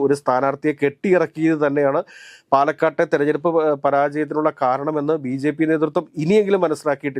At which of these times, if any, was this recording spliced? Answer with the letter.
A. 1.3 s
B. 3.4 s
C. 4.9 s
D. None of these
D